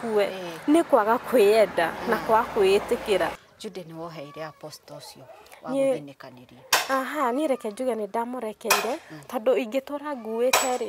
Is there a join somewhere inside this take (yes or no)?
yes